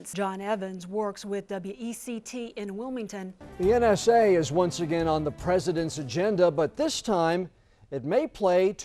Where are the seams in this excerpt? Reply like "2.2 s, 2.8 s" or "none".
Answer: 3.4 s